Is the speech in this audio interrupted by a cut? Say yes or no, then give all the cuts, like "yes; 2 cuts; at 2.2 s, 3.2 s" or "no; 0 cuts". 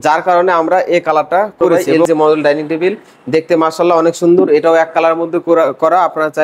yes; 1 cut; at 2.0 s